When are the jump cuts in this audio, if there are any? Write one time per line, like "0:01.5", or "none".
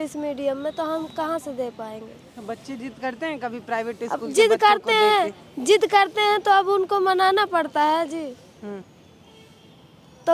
none